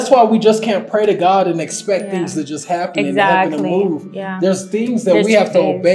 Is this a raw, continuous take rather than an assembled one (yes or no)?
yes